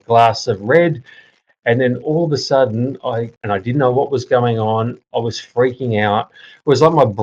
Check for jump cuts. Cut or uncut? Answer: cut